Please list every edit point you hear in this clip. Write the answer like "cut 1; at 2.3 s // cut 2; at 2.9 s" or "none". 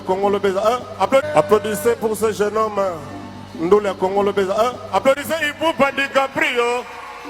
none